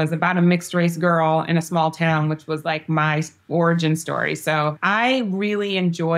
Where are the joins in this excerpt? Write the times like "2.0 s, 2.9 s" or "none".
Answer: 4.8 s